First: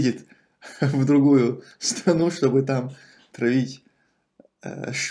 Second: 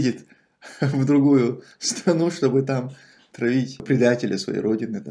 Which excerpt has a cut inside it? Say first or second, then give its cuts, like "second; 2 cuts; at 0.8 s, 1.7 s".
second; 1 cut; at 3.8 s